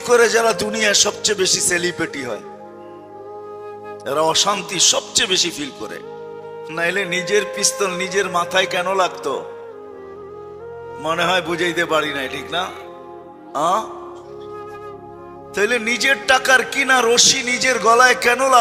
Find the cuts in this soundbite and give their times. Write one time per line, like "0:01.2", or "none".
none

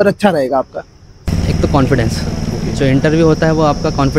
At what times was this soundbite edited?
0:01.2

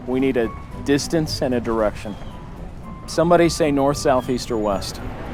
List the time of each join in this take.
none

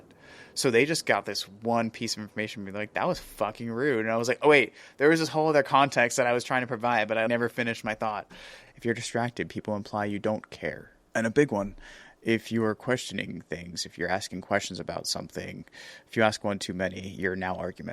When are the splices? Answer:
0:07.3
0:08.6

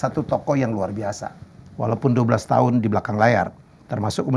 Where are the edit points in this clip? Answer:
none

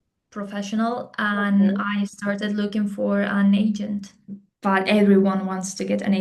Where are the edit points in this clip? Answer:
0:04.4

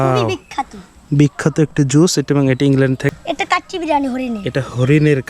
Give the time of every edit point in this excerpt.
0:03.1

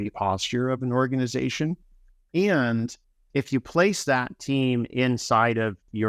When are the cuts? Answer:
none

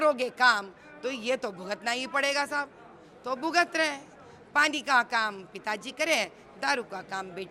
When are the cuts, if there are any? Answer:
none

